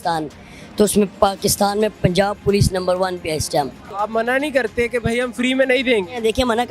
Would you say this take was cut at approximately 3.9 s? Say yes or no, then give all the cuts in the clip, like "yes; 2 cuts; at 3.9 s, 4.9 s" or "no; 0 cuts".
yes; 1 cut; at 3.9 s